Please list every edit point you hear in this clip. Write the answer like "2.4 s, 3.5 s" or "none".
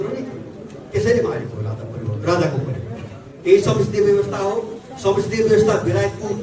3.3 s